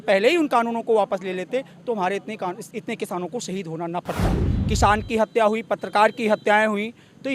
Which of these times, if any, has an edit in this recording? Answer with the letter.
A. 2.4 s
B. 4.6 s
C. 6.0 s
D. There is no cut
B